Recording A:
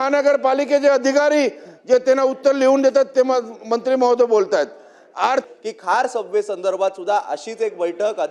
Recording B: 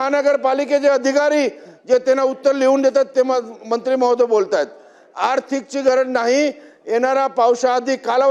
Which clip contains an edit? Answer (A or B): A